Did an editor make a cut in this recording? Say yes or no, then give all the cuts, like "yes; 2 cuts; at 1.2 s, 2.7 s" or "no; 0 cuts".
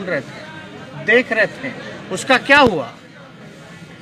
no; 0 cuts